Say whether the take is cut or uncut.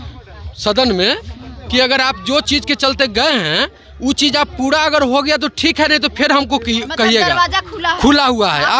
uncut